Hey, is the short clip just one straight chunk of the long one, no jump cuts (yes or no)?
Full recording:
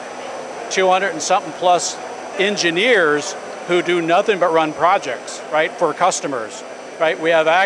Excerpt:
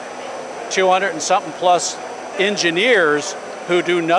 yes